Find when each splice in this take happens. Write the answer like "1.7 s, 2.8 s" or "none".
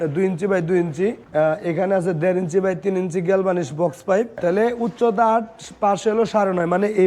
1.2 s, 4.4 s